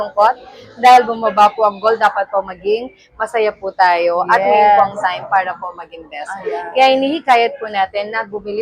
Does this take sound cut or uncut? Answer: uncut